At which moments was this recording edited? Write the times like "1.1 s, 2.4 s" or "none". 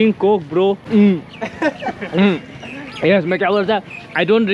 0.8 s, 2.5 s